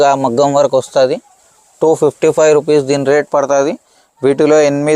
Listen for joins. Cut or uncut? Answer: uncut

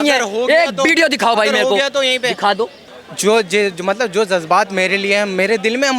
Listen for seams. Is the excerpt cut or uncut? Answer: cut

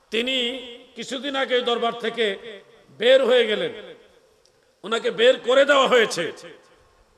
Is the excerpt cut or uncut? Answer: uncut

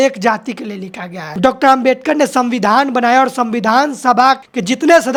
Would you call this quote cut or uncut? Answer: uncut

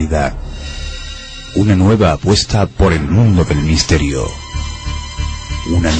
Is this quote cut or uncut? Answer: cut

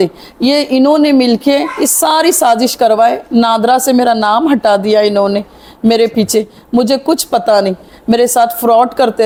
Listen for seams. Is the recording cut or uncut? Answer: uncut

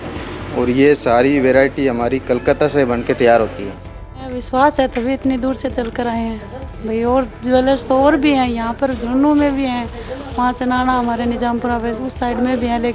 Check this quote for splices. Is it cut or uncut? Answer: cut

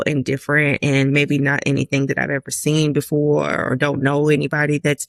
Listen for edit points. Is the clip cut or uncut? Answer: uncut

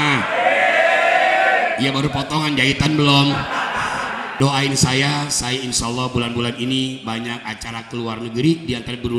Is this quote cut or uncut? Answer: cut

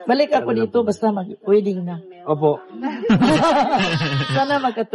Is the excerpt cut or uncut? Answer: cut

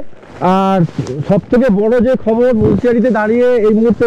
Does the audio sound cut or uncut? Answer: uncut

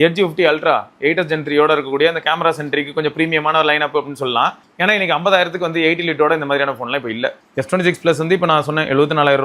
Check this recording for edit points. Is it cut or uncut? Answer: cut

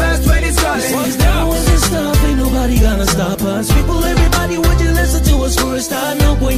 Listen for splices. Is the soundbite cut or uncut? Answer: uncut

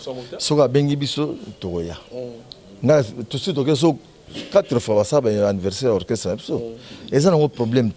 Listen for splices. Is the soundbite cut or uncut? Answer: uncut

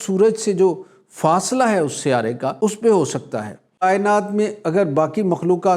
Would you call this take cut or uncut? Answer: cut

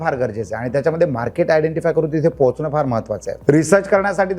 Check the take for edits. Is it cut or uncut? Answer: cut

